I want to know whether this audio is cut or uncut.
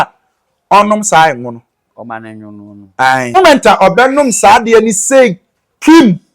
cut